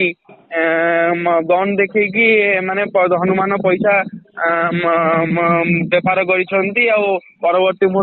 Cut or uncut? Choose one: uncut